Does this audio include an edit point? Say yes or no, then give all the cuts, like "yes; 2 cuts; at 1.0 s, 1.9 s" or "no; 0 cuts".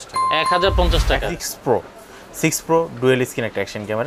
yes; 1 cut; at 1.2 s